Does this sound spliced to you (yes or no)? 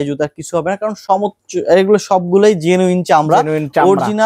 no